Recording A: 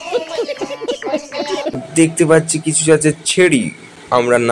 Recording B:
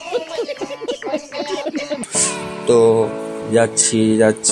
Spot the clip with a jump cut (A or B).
A